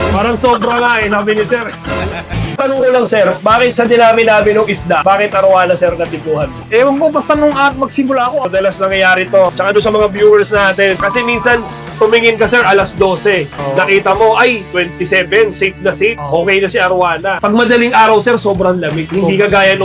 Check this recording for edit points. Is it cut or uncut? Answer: cut